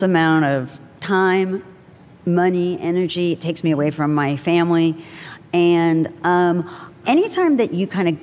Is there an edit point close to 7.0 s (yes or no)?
yes